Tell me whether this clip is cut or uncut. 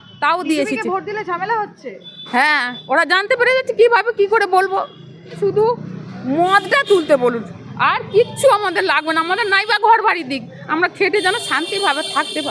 cut